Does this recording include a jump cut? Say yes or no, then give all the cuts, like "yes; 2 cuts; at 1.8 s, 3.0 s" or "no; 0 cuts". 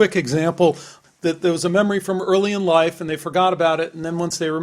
yes; 1 cut; at 0.9 s